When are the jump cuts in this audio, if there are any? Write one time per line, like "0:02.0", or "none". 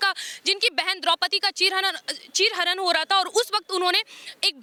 none